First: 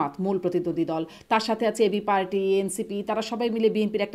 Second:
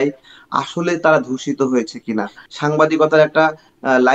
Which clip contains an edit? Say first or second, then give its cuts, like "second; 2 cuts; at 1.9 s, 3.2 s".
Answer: second; 1 cut; at 2.4 s